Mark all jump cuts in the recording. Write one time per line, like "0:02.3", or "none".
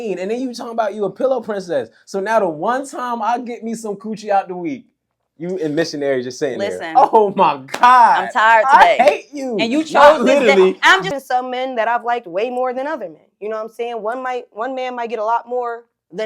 0:11.0